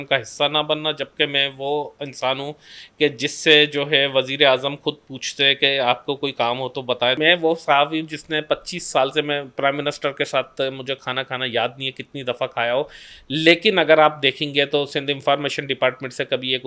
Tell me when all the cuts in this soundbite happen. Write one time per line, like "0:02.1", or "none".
0:07.2